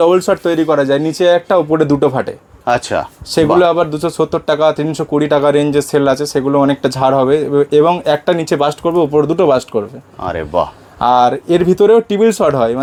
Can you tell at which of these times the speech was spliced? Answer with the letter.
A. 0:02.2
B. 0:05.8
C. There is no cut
C